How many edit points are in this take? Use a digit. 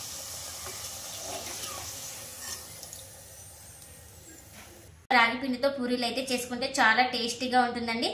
1